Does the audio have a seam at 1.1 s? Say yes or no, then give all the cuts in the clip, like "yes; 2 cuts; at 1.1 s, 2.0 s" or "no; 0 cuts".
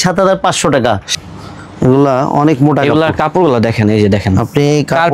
yes; 1 cut; at 1.1 s